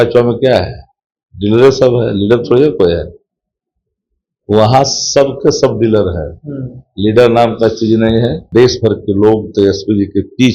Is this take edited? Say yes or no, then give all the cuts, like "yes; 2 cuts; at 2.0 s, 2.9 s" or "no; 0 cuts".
yes; 1 cut; at 8.4 s